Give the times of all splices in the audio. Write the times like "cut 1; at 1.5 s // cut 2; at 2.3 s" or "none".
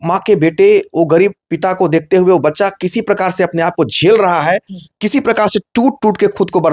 none